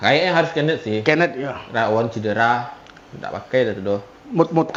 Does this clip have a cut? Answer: no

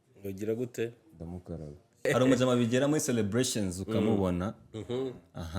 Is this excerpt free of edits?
no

